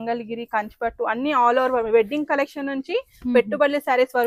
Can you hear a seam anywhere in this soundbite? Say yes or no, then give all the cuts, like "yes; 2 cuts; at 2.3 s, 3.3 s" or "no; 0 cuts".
no; 0 cuts